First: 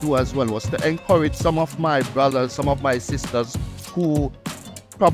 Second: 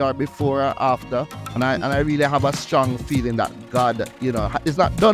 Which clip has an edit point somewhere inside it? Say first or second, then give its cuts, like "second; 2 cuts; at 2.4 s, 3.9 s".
second; 1 cut; at 1.4 s